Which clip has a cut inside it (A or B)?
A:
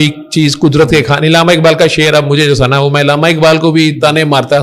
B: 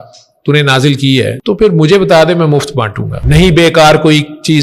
B